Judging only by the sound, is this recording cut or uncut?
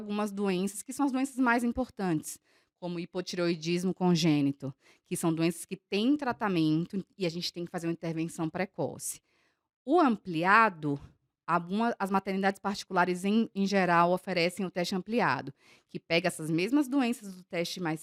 uncut